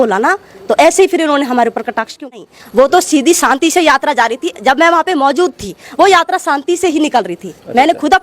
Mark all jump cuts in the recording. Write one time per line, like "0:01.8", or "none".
0:02.6